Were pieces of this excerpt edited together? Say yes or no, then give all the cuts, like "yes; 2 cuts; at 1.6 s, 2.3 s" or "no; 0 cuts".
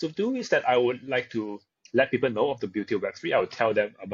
no; 0 cuts